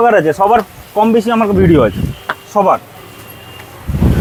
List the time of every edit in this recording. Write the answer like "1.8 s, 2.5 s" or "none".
none